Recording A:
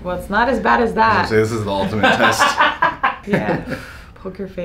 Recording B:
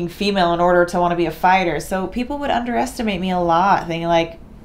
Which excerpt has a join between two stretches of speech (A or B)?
A